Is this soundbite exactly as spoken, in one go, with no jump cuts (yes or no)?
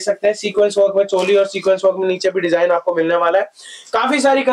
yes